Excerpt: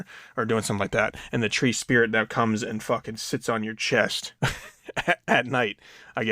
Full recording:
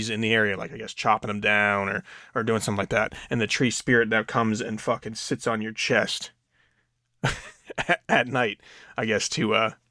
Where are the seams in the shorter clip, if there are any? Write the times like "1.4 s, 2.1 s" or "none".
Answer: 4.2 s